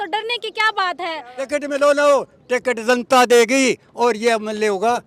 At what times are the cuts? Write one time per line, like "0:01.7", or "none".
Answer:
0:01.3